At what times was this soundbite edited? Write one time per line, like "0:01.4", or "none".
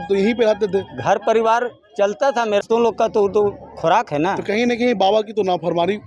0:02.6